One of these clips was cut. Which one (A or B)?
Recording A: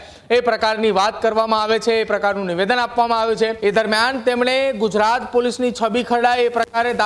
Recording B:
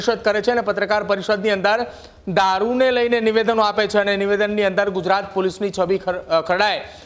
A